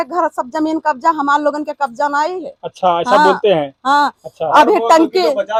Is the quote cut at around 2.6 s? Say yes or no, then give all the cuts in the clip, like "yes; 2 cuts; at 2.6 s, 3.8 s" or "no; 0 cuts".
no; 0 cuts